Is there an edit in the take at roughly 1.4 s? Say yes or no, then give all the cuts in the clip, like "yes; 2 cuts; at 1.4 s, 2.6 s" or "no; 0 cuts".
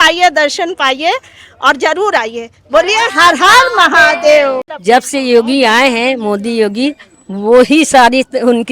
no; 1 cut; at 4.7 s